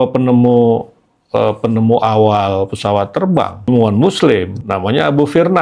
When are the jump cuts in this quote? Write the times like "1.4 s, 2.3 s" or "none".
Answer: 3.7 s, 4.6 s